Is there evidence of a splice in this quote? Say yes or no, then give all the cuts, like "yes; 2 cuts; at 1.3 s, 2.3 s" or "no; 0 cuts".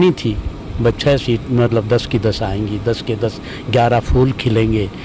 no; 0 cuts